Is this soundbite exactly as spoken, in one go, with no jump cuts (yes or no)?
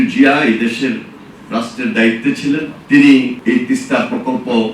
no